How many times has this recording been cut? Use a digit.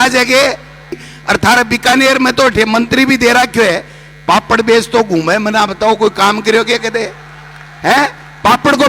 1